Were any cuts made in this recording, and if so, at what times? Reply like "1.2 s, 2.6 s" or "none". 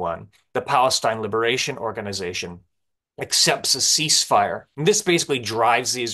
4.7 s